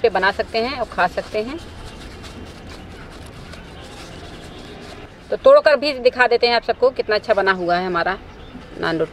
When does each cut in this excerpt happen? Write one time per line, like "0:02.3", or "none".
none